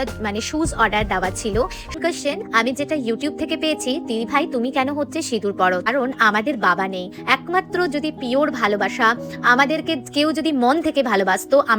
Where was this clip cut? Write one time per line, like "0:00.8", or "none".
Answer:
0:01.9
0:05.9